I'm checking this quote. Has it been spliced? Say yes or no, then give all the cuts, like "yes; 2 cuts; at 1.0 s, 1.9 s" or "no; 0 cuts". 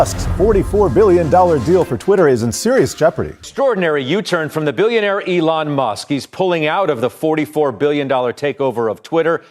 yes; 1 cut; at 3.4 s